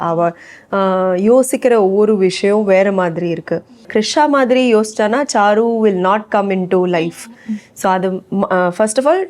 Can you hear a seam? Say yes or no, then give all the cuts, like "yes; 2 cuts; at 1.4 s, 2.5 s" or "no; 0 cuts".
yes; 1 cut; at 3.9 s